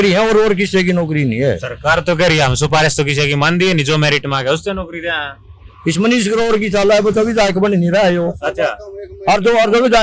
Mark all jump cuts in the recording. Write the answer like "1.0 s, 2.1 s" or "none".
none

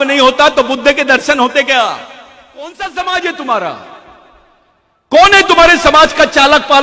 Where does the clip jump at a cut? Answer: 2.7 s

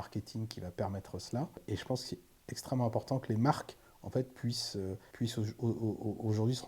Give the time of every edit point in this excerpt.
1.6 s, 5.1 s

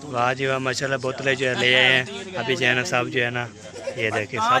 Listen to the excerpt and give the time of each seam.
none

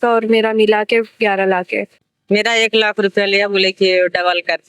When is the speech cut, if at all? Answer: 2.0 s

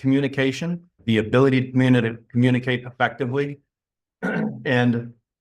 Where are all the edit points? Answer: 1.0 s

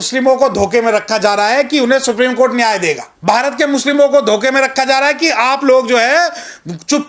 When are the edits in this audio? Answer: 3.1 s

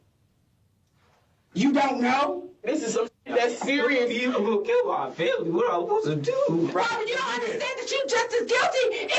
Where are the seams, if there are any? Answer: 2.7 s, 6.7 s

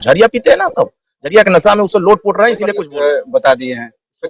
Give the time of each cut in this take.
2.7 s

